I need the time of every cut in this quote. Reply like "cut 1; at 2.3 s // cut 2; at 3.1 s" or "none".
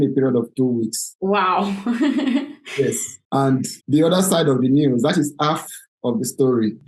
none